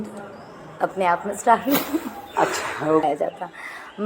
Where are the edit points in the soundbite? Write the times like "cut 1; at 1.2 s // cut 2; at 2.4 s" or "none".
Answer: cut 1; at 3.0 s